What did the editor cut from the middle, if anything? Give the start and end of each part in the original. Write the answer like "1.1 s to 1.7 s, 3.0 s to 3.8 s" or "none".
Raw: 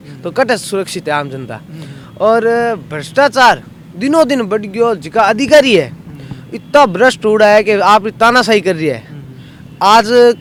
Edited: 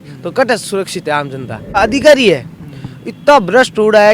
1.8 s to 5.2 s